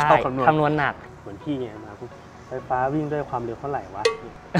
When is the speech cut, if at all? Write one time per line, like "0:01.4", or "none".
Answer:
0:01.0